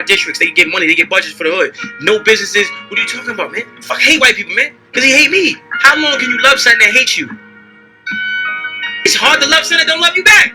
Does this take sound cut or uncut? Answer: uncut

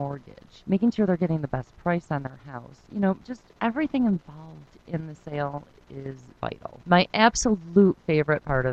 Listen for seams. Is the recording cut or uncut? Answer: uncut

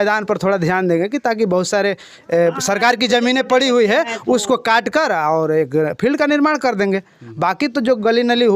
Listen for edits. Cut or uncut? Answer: uncut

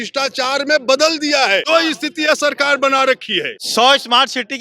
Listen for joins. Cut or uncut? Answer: cut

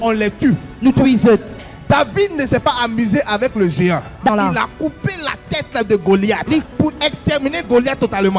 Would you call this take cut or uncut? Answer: uncut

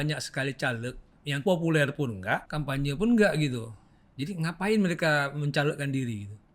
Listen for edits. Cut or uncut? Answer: cut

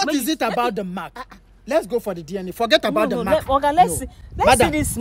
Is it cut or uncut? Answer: uncut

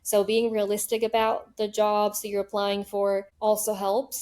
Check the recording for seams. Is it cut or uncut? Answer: cut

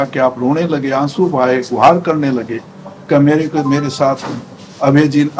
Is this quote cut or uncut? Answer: uncut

